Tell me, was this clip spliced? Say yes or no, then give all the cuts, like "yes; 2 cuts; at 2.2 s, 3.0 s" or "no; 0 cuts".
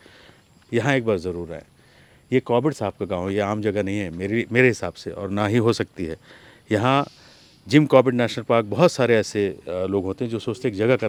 no; 0 cuts